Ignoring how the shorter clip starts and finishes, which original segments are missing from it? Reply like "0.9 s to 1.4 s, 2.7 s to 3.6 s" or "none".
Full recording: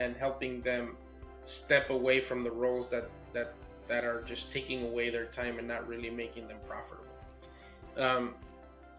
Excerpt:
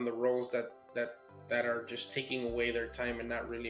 none